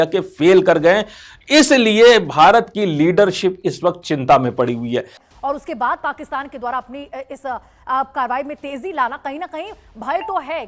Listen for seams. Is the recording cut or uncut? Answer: cut